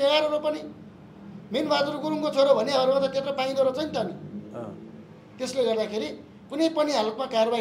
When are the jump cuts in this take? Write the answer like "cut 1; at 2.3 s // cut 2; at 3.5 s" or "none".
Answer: none